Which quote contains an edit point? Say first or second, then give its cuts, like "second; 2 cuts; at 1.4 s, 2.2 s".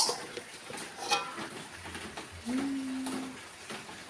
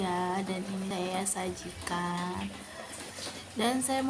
first; 1 cut; at 1.5 s